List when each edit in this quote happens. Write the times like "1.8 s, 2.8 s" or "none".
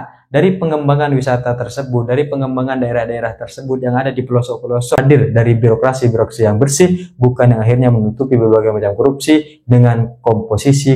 5.0 s